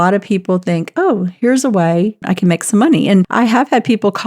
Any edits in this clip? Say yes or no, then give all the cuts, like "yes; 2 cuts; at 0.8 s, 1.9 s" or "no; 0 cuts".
yes; 2 cuts; at 2.2 s, 3.3 s